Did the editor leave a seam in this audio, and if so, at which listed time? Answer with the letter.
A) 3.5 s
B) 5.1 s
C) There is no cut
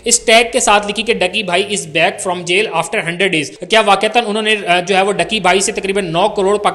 A